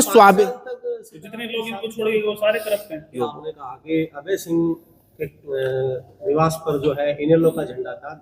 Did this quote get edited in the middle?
yes; 1 cut; at 3.2 s

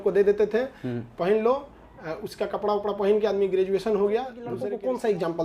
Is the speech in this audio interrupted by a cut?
yes; 1 cut; at 4.4 s

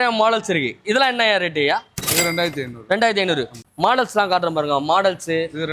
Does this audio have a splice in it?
yes; 1 cut; at 3.6 s

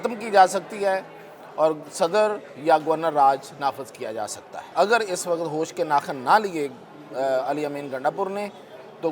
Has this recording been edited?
yes; 1 cut; at 4.7 s

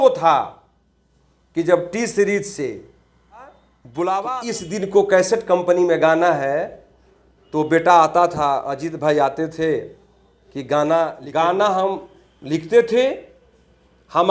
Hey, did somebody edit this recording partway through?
yes; 2 cuts; at 4.4 s, 11.2 s

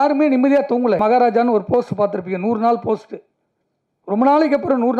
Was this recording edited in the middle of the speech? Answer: yes; 1 cut; at 1.0 s

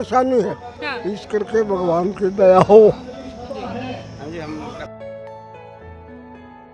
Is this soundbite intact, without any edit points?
no; 1 cut; at 4.8 s

